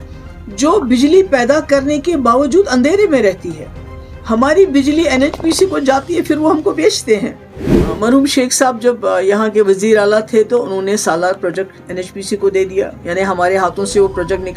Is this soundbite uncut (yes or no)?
no